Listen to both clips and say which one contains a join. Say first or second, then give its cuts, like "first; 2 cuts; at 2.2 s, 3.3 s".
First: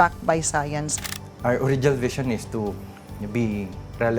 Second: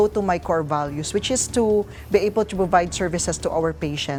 first; 1 cut; at 1.1 s